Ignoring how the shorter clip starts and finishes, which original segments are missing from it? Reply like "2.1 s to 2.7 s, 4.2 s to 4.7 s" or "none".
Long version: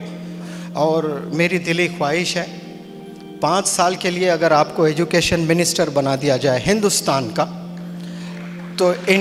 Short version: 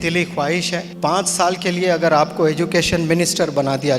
2.5 s to 3.3 s